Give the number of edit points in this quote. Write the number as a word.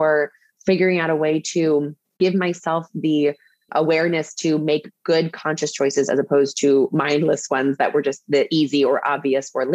one